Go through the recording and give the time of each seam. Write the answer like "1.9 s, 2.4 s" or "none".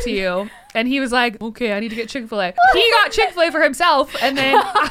1.4 s, 2.5 s